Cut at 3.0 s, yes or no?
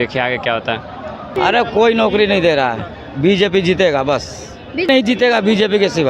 no